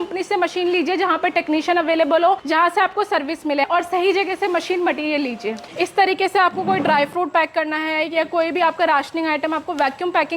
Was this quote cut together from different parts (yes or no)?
yes